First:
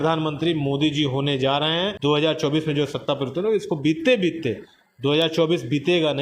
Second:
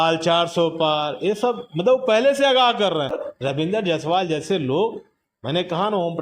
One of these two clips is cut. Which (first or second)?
second